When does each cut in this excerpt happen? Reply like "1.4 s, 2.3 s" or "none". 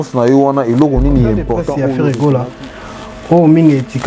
1.7 s